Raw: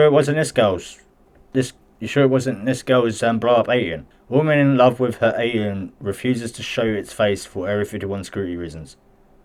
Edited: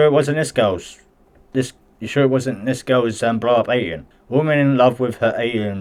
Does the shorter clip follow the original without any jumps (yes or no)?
yes